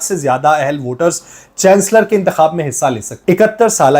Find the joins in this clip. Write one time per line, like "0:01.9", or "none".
0:03.1